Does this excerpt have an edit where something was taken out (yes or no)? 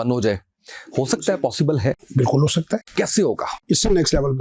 yes